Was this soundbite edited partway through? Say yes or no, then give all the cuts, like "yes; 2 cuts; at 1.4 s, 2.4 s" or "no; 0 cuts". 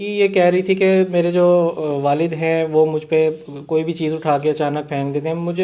no; 0 cuts